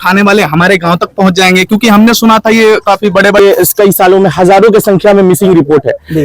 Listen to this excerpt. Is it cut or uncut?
cut